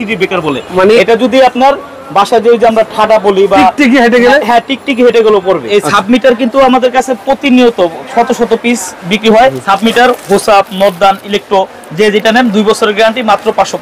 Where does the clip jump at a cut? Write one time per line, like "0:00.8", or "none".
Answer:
0:05.6
0:09.5